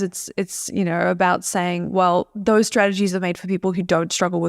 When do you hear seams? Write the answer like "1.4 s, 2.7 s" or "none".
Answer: 2.3 s